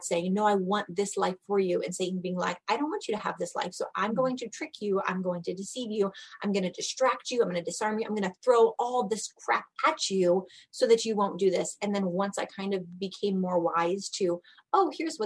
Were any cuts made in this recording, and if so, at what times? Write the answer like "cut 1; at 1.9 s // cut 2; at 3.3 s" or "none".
none